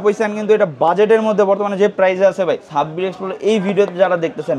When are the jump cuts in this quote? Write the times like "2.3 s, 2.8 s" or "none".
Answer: 2.7 s